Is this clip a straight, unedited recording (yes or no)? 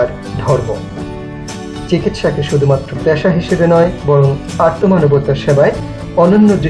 yes